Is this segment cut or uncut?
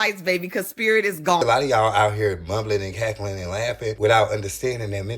cut